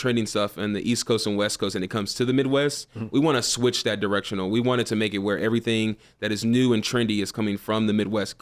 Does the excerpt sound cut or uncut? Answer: uncut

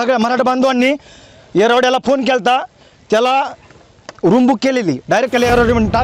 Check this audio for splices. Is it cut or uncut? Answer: uncut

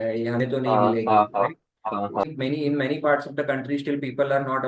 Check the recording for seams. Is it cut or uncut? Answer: cut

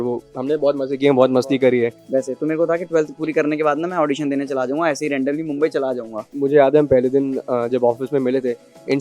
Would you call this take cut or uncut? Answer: cut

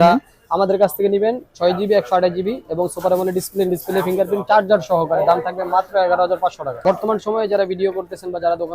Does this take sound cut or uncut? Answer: cut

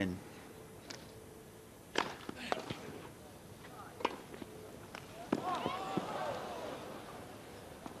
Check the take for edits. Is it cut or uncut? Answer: uncut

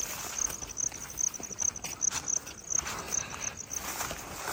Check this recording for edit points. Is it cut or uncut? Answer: uncut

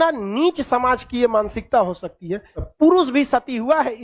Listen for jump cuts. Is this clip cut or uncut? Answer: cut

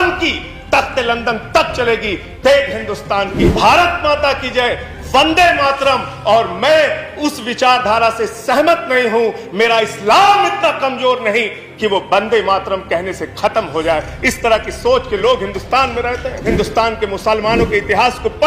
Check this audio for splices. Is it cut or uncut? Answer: cut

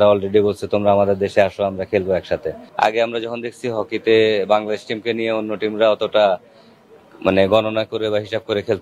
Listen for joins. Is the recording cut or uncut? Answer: cut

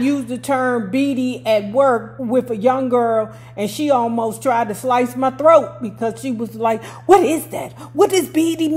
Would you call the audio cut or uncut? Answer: cut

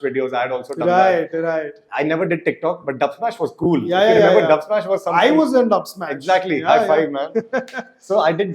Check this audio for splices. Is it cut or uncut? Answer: uncut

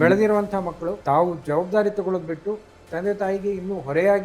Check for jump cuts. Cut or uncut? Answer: cut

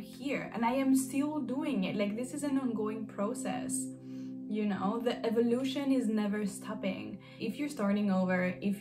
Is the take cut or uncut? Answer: cut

